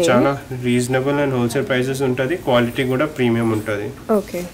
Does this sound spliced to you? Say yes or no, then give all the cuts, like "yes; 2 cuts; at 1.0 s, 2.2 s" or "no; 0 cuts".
no; 0 cuts